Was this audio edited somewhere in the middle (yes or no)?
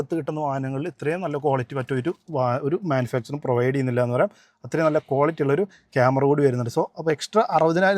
no